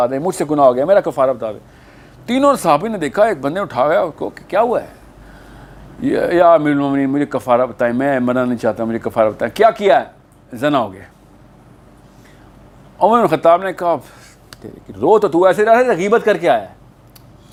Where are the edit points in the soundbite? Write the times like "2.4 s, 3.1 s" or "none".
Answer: none